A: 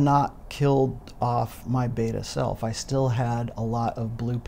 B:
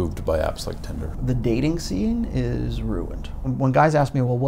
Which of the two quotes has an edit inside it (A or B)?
B